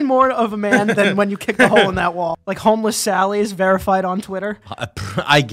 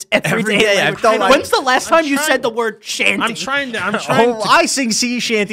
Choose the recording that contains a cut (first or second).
first